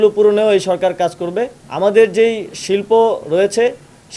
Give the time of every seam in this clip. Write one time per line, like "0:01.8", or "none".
0:01.6